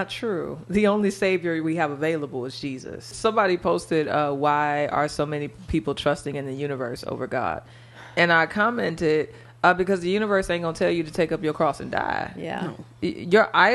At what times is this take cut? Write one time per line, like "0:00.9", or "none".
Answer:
0:03.1